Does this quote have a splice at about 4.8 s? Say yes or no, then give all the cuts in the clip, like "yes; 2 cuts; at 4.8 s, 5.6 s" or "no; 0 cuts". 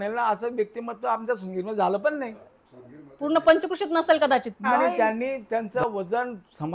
yes; 1 cut; at 4.8 s